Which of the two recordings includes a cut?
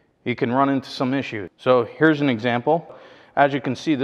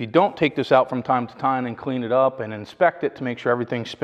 first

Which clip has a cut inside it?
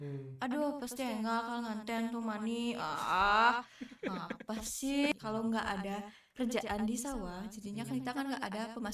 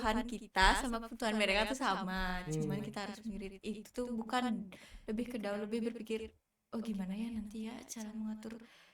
first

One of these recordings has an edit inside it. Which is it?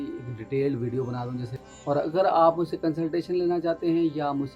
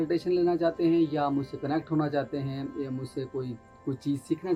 first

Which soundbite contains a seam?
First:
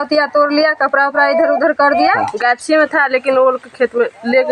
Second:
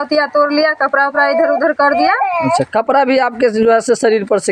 first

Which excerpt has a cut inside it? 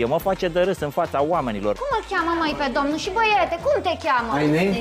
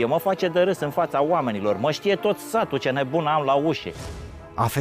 first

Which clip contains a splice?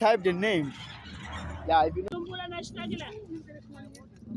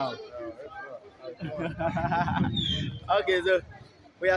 first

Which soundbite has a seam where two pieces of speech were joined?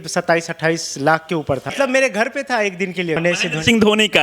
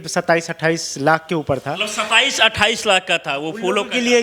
first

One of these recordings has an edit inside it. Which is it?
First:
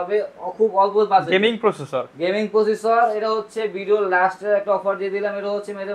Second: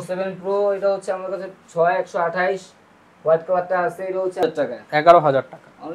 second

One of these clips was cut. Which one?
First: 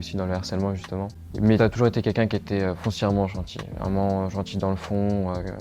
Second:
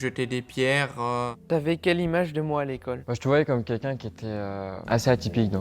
second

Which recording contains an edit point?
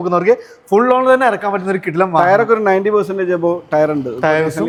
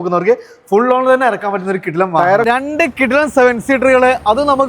second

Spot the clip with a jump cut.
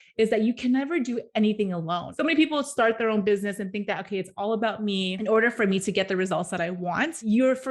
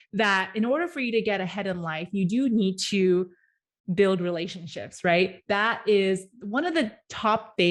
first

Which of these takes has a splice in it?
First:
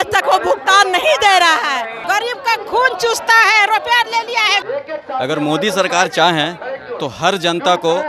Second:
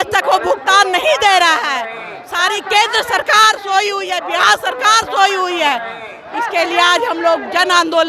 first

